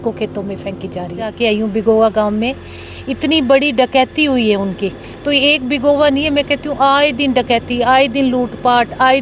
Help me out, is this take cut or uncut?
cut